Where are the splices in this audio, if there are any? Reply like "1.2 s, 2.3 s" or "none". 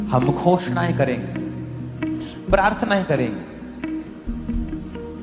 none